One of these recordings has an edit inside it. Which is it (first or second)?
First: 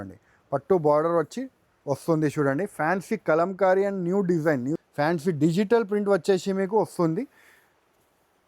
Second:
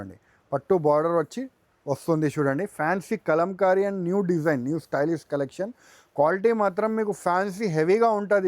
first